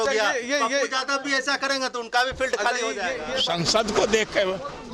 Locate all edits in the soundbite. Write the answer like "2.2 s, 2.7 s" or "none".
3.3 s